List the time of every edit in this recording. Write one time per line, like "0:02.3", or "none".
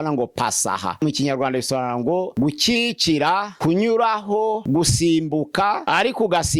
0:01.0
0:02.3
0:03.5
0:04.6
0:05.8